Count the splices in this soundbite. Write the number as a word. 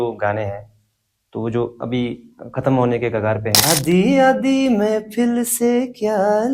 one